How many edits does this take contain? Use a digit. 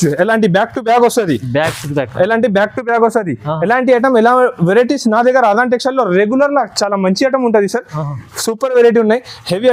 0